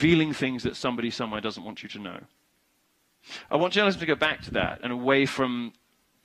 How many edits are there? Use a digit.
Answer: 1